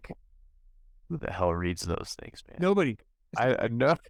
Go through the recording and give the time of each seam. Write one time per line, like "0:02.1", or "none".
none